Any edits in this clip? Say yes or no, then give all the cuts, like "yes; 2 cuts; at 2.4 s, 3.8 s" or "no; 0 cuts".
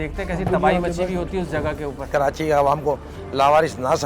yes; 1 cut; at 2.1 s